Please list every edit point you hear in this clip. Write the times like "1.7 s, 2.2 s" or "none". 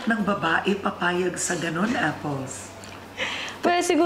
none